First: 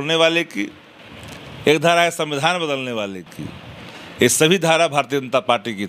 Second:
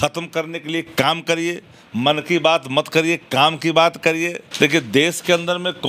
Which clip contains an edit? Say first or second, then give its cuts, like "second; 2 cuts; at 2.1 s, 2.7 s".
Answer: second; 1 cut; at 4.4 s